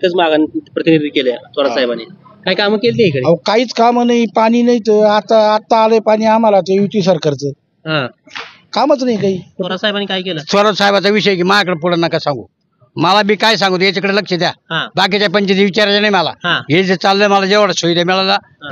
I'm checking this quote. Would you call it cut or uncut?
cut